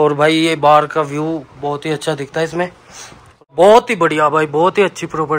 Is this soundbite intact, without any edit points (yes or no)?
no